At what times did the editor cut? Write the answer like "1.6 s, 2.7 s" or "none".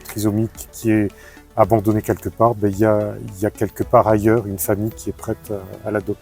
none